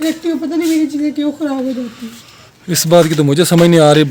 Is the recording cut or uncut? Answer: uncut